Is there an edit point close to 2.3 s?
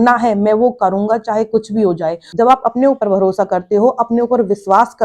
yes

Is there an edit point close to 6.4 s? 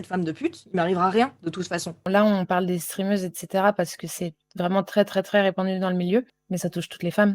yes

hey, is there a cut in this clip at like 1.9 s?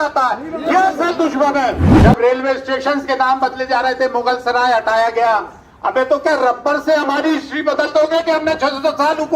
yes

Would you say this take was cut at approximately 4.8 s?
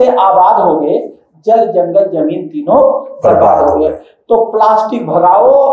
no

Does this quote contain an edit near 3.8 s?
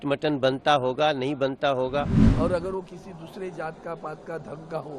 no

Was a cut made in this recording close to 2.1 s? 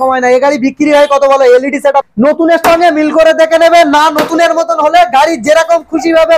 yes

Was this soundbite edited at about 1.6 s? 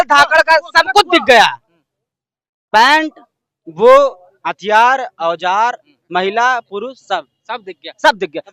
no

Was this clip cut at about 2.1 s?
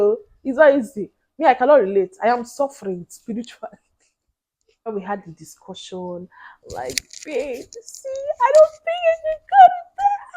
no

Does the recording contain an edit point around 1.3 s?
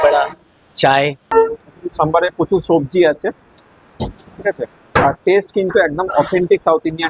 yes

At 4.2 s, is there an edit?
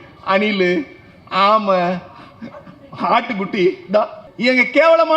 yes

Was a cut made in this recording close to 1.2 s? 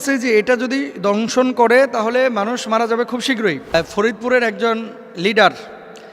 no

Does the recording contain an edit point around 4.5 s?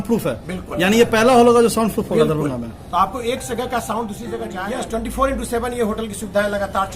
yes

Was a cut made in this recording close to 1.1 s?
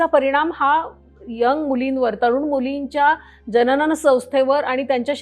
no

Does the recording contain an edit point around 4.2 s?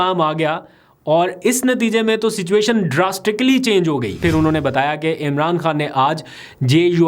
yes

